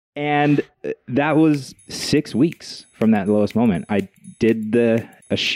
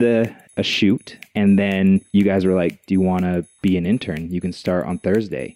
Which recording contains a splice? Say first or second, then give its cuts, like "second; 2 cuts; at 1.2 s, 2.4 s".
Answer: second; 1 cut; at 2.1 s